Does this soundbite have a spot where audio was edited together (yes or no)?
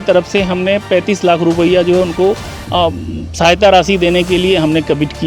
no